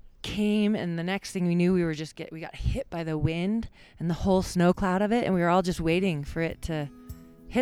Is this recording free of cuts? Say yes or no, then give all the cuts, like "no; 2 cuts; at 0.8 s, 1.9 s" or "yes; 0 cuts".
yes; 0 cuts